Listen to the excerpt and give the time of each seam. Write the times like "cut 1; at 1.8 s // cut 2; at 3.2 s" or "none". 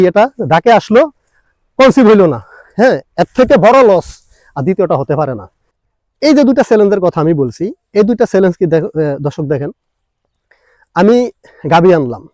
cut 1; at 5.7 s